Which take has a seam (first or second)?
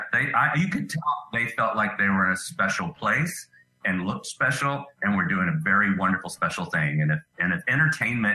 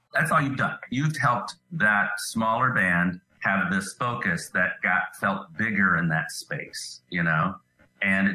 second